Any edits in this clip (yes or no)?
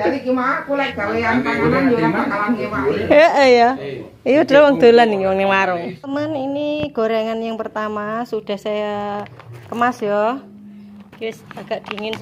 no